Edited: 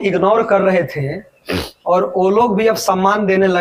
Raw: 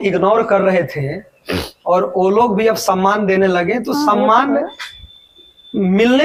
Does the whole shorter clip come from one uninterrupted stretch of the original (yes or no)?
yes